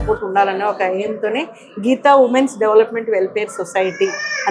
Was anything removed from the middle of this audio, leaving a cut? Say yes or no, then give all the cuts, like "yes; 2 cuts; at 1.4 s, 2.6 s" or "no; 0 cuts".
no; 0 cuts